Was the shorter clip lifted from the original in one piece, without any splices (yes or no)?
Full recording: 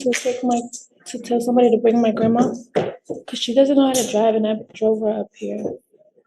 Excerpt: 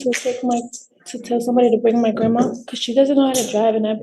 no